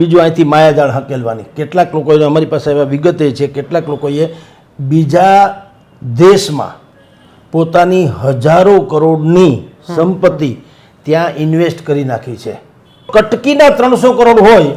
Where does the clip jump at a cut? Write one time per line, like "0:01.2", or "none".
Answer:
0:13.1